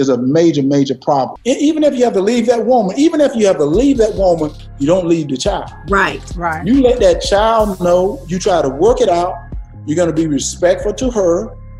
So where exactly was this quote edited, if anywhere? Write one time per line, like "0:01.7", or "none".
none